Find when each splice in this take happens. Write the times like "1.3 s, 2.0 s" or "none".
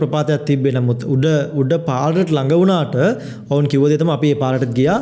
none